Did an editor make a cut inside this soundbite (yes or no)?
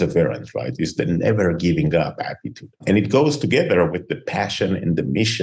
no